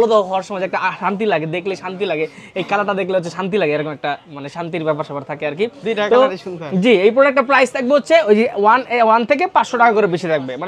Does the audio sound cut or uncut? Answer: uncut